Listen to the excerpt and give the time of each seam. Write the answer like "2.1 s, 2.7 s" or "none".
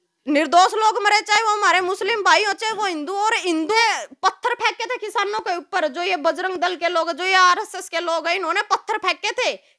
3.8 s